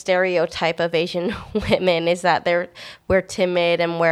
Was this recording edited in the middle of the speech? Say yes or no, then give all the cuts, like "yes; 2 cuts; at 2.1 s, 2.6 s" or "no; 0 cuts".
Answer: no; 0 cuts